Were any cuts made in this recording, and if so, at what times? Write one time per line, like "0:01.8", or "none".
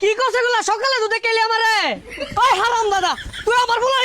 0:02.0